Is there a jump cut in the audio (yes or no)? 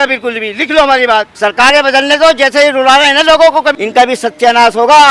yes